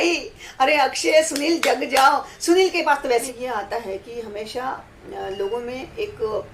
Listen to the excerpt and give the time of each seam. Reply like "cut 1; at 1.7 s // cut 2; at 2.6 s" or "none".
cut 1; at 3.3 s